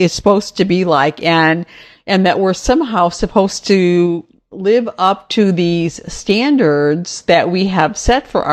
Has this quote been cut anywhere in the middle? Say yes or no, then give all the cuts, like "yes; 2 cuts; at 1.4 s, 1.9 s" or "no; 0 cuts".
no; 0 cuts